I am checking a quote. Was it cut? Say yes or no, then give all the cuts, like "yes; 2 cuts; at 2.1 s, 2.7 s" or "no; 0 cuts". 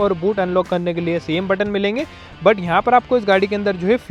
no; 0 cuts